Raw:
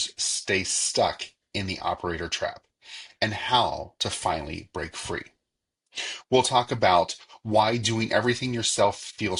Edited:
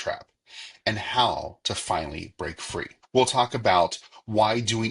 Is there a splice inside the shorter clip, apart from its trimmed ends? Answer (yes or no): yes